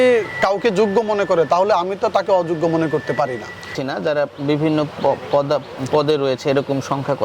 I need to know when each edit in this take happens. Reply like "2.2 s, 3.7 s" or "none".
3.8 s